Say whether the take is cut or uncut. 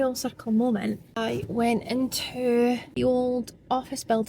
cut